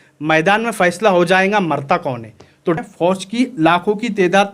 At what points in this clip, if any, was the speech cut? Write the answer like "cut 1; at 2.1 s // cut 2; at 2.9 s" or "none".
cut 1; at 2.8 s